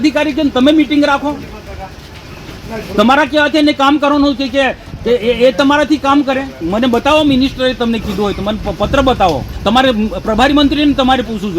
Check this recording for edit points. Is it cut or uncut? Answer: cut